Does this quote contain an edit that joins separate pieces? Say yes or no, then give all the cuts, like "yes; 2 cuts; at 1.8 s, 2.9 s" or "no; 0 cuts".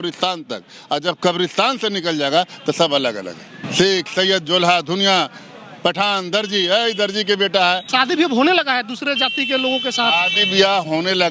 yes; 2 cuts; at 3.5 s, 7.9 s